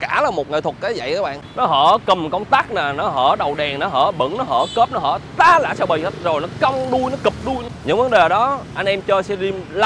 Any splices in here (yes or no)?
yes